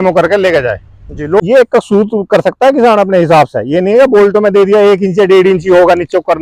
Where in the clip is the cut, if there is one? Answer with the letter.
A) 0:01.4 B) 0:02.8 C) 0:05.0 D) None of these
A